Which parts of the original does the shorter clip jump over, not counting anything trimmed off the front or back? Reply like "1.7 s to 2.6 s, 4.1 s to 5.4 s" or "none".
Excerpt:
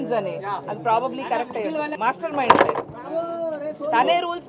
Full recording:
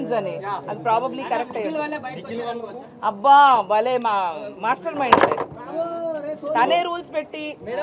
1.9 s to 4.6 s

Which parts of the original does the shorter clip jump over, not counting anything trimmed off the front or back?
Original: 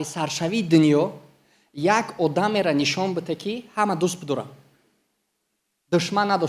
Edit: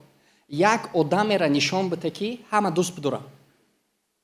none

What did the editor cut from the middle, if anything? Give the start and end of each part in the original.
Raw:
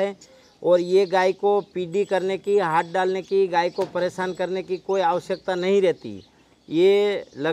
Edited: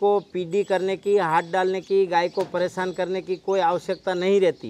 none

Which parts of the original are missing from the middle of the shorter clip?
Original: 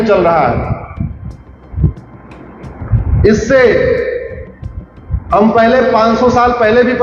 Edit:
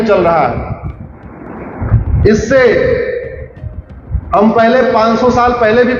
1.0 s to 1.9 s

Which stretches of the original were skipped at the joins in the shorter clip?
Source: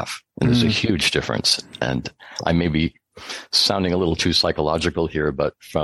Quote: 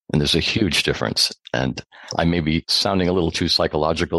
3.0 s to 3.6 s

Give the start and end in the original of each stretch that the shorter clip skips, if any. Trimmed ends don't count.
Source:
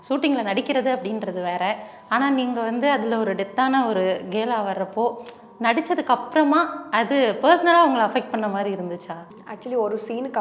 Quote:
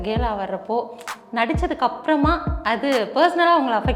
none

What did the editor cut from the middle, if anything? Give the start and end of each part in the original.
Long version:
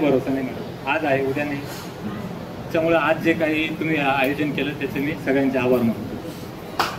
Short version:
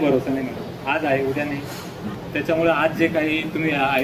2.2 s to 2.5 s

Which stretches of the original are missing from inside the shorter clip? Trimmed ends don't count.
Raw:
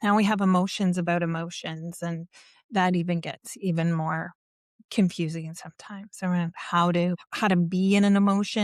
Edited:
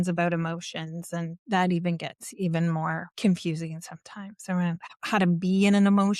2.3 s to 2.6 s, 4.3 s to 4.8 s, 6.6 s to 7.2 s

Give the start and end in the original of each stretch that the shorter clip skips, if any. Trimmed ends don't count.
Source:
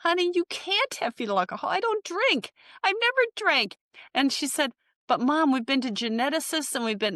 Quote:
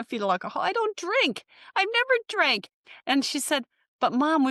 none

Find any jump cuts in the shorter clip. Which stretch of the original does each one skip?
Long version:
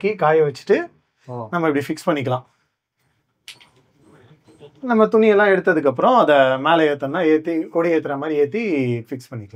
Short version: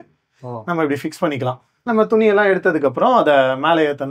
2.6 s to 4.7 s

